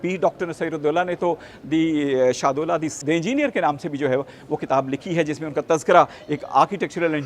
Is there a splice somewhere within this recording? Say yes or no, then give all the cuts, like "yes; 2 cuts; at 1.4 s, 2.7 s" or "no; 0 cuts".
no; 0 cuts